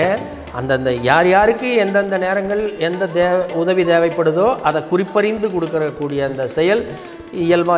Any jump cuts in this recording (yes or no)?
no